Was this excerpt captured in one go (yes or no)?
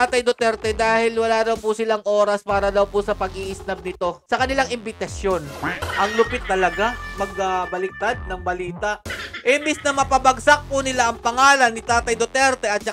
no